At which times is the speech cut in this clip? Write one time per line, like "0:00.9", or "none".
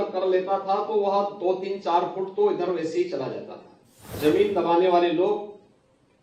0:04.0